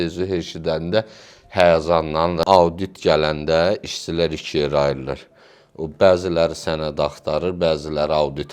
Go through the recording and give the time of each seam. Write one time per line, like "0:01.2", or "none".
0:02.4